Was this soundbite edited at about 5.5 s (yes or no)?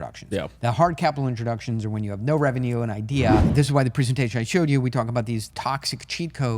yes